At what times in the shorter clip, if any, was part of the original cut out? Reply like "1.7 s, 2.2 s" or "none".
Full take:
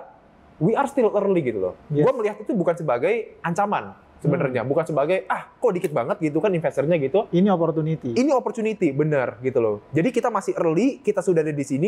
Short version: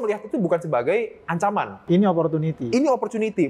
1.8 s